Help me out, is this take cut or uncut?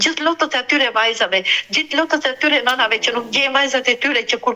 uncut